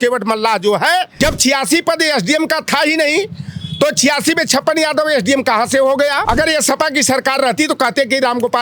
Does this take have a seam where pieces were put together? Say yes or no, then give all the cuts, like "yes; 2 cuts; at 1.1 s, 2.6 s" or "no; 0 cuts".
yes; 2 cuts; at 1.1 s, 6.2 s